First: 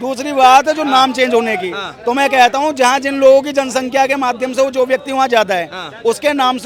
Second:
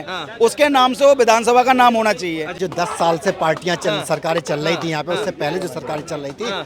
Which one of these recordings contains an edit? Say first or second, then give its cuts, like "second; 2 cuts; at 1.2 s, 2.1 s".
second; 1 cut; at 2.6 s